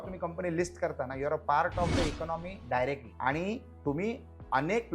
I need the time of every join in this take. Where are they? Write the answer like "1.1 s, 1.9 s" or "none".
3.1 s